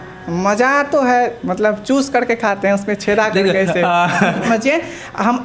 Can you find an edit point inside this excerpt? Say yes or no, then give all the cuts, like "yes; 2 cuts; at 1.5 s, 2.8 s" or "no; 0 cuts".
yes; 1 cut; at 4.5 s